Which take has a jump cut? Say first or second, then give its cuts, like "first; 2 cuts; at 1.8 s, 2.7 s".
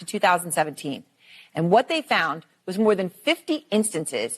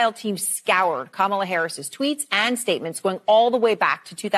first; 1 cut; at 1.2 s